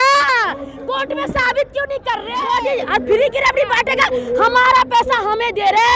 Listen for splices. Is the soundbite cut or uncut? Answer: cut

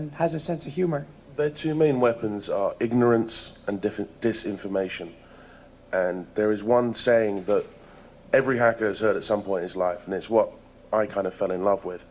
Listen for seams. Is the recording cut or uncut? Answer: cut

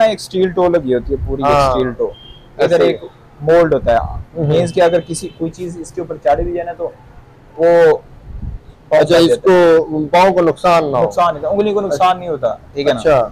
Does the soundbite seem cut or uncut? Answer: uncut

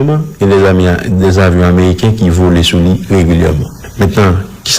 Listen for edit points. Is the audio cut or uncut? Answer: cut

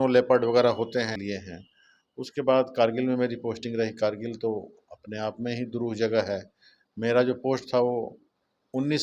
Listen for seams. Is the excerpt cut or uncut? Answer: cut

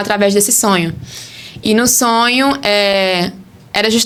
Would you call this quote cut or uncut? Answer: uncut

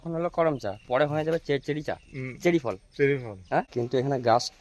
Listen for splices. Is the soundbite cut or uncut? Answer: cut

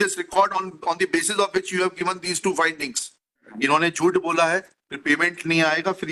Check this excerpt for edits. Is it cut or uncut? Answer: cut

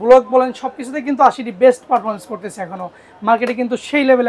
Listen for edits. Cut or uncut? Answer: uncut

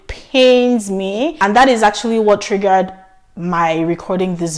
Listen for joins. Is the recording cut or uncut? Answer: cut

